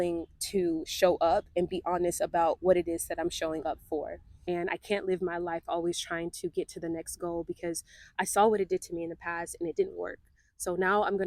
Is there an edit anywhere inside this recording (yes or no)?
yes